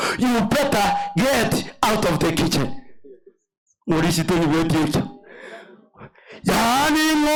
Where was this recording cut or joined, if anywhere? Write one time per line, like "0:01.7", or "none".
none